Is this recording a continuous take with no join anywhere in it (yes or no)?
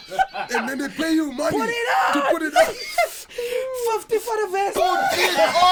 yes